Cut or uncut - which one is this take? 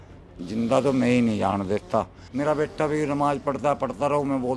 cut